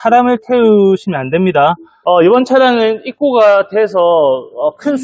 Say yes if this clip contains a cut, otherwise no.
yes